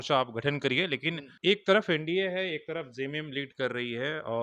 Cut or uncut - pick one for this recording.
cut